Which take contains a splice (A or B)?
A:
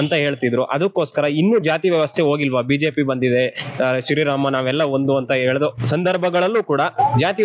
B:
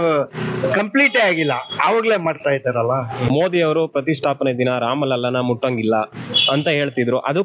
B